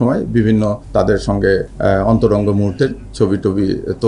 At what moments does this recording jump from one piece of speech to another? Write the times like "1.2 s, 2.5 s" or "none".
0.8 s, 1.7 s